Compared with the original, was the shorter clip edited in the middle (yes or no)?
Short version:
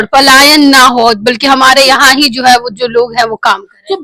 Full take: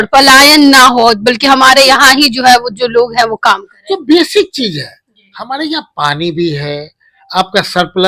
no